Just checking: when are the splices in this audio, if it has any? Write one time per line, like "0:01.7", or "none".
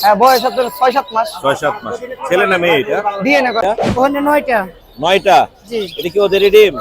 0:03.6

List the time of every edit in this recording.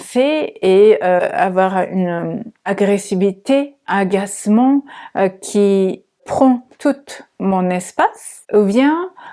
0:03.8
0:06.2
0:08.3

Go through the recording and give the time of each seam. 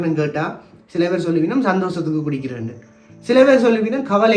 none

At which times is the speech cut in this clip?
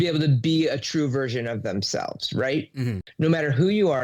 0:03.0

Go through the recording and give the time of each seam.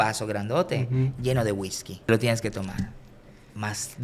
0:02.1

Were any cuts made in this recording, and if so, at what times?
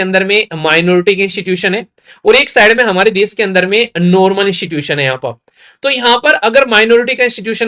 none

